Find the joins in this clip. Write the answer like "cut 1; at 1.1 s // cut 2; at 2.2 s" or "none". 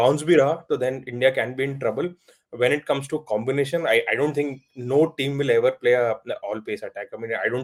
none